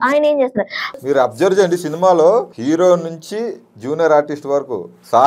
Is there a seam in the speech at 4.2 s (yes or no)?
no